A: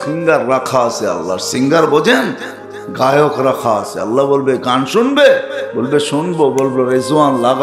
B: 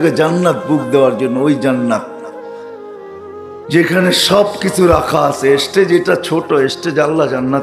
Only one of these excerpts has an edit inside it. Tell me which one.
B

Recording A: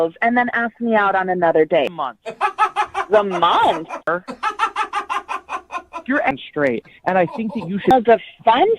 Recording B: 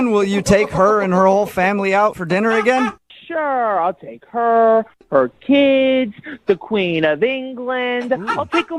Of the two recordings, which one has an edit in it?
A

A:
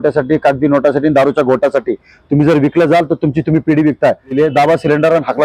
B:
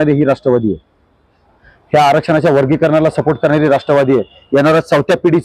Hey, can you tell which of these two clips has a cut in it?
A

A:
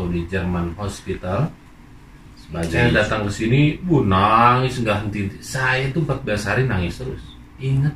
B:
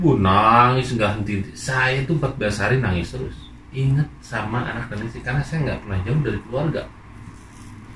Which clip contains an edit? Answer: A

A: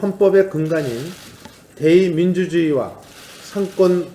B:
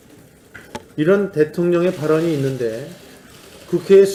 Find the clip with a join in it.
A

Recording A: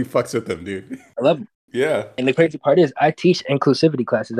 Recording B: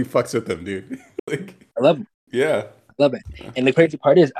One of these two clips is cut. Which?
A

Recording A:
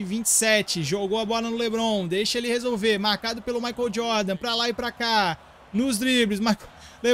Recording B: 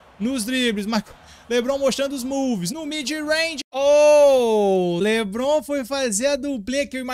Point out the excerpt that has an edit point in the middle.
B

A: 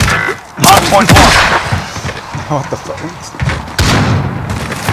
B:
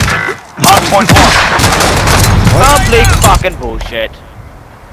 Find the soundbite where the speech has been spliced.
B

